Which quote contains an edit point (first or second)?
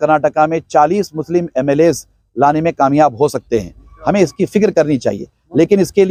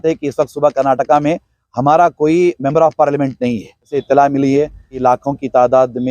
second